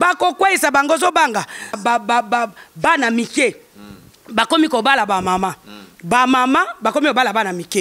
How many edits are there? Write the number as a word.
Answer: one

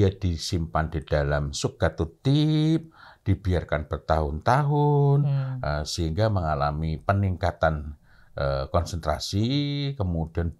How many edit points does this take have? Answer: zero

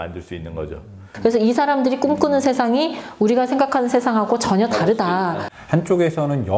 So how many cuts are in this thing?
two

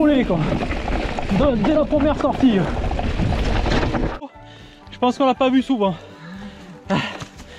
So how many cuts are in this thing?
one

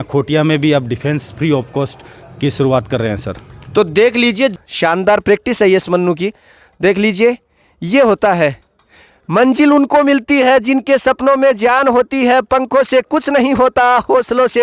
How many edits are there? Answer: one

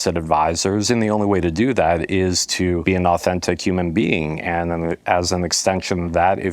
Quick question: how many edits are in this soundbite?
one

